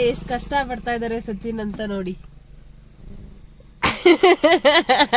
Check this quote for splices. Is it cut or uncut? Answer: uncut